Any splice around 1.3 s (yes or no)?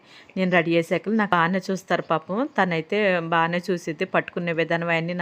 yes